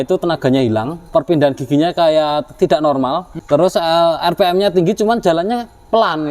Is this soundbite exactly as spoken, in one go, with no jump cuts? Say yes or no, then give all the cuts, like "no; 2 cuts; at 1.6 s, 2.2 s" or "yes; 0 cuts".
no; 2 cuts; at 1.1 s, 3.3 s